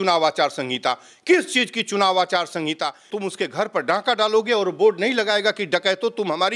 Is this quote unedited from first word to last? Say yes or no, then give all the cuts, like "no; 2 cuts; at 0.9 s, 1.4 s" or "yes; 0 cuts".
no; 1 cut; at 3.1 s